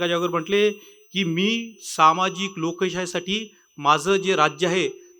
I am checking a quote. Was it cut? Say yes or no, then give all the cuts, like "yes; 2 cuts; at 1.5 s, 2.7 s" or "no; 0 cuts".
no; 0 cuts